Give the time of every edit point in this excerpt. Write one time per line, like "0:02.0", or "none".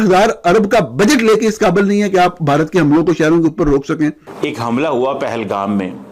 0:04.3